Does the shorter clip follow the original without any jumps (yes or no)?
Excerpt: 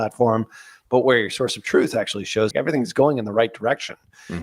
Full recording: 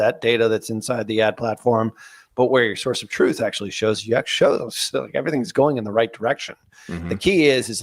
no